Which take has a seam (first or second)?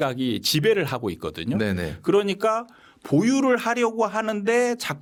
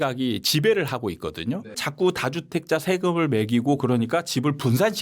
second